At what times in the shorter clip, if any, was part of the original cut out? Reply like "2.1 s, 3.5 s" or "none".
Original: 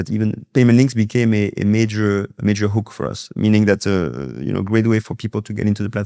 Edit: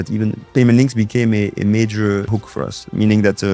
2.3 s